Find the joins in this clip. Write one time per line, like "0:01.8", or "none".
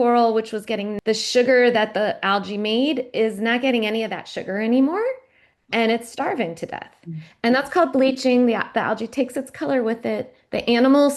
0:00.9